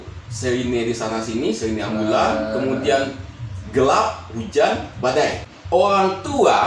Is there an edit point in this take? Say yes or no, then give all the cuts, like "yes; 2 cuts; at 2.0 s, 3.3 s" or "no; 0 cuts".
yes; 1 cut; at 5.5 s